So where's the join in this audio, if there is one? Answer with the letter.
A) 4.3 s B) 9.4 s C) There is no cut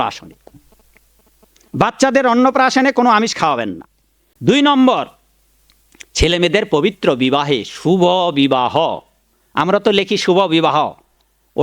A